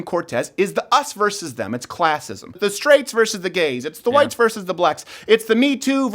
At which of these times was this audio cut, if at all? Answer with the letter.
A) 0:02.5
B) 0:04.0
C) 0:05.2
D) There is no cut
A